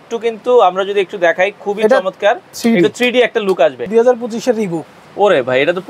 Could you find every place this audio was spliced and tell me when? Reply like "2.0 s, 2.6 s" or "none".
3.8 s